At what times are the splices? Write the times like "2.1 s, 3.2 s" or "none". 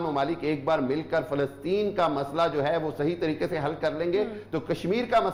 none